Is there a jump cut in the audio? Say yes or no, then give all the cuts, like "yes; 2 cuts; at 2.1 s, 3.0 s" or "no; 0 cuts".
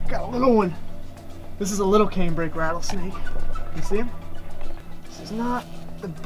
no; 0 cuts